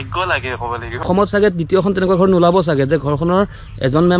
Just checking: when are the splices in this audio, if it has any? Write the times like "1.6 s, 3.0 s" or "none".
1.0 s

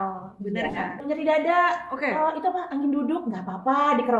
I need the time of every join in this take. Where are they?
1.0 s

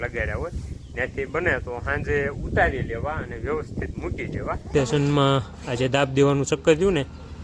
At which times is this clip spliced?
4.7 s

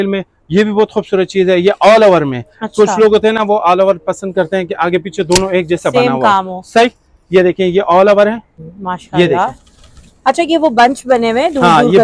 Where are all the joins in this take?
none

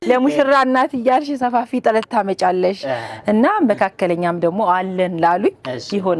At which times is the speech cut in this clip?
none

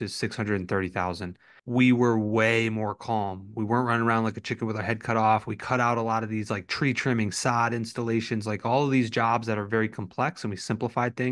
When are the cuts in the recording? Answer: 1.5 s

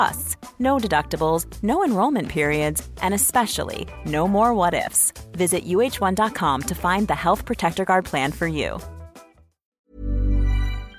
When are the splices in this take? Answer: 9.7 s

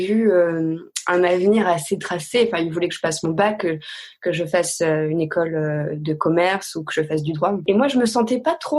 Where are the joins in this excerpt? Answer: 7.6 s

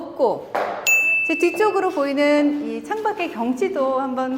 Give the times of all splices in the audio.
0.9 s

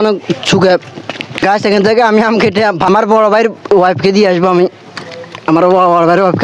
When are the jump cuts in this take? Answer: 1.3 s, 2.9 s

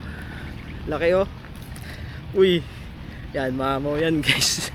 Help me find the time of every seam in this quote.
none

